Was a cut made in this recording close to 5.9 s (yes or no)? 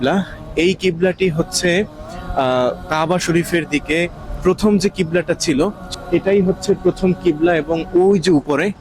yes